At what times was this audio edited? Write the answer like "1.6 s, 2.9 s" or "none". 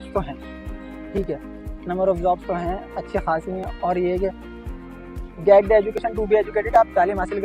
none